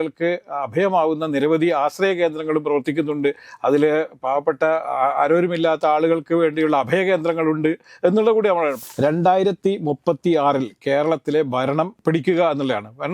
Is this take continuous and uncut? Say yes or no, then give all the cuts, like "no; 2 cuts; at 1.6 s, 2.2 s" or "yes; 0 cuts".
no; 1 cut; at 8.8 s